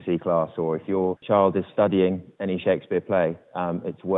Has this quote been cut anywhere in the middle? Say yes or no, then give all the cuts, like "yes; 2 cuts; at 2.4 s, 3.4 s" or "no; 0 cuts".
yes; 1 cut; at 1.2 s